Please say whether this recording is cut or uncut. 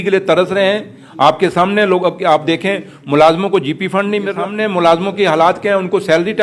cut